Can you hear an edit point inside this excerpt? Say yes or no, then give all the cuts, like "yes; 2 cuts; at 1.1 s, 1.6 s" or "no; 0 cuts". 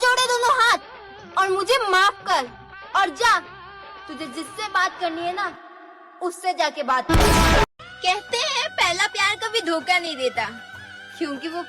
yes; 1 cut; at 7.9 s